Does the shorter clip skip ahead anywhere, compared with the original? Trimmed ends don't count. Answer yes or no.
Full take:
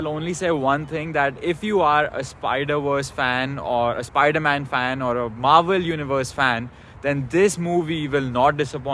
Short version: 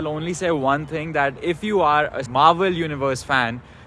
yes